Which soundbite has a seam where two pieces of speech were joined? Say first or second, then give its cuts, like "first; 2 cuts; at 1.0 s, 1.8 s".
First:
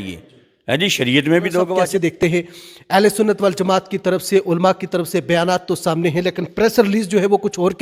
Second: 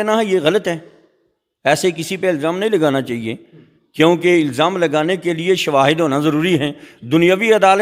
first; 1 cut; at 2.1 s